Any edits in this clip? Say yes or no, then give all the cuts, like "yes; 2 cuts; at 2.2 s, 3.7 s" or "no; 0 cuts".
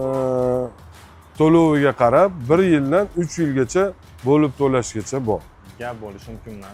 no; 0 cuts